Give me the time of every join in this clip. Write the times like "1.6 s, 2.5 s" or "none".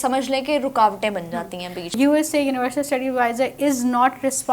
2.0 s